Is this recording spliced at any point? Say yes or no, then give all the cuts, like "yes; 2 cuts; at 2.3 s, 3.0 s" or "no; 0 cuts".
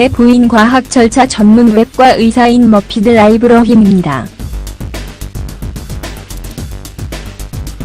yes; 1 cut; at 2.3 s